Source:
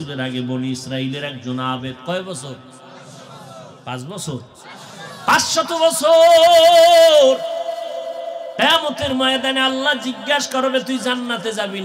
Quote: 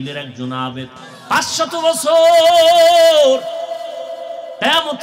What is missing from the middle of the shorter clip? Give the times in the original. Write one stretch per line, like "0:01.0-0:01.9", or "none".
0:02.0-0:04.9